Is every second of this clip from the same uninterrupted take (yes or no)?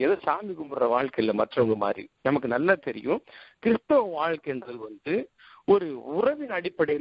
yes